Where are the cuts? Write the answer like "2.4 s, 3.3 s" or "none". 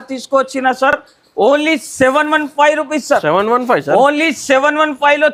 none